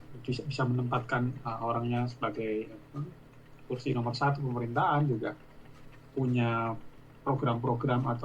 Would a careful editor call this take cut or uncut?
cut